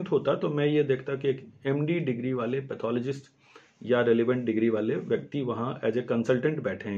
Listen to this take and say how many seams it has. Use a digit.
0